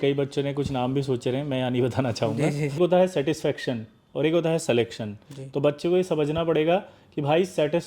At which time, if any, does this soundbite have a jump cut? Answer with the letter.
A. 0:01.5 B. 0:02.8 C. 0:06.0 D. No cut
B